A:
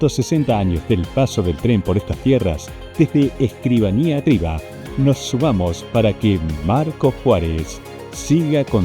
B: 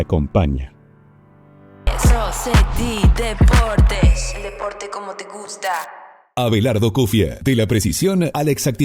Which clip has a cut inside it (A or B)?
B